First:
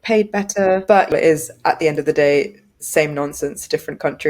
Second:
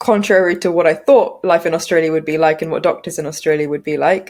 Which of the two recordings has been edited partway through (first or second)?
first